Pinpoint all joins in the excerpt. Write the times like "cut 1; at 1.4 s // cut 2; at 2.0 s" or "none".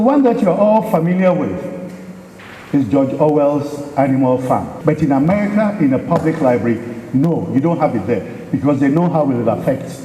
cut 1; at 4.7 s

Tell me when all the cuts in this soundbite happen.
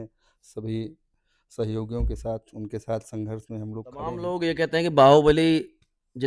cut 1; at 4.2 s

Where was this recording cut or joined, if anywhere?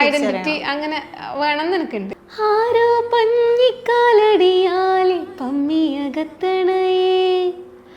cut 1; at 2.2 s

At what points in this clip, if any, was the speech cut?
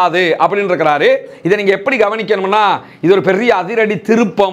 none

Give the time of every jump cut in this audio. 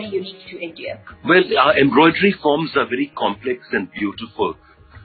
cut 1; at 1.1 s

